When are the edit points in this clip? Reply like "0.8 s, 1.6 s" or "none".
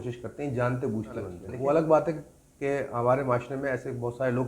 1.4 s

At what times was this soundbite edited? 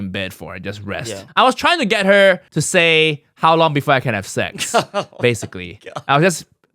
1.2 s, 2.5 s

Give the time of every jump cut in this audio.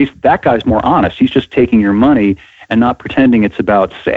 none

